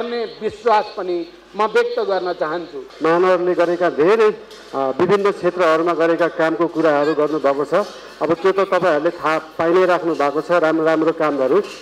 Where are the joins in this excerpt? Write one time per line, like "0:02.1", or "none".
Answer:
0:02.8

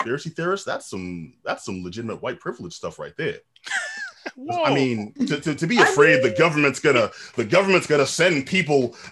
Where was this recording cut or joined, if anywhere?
none

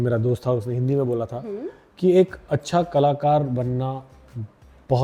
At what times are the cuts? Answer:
none

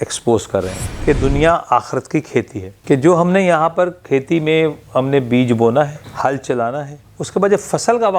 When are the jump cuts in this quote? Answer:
0:00.9
0:02.7

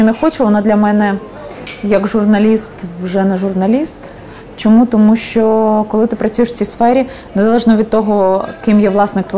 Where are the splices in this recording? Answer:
none

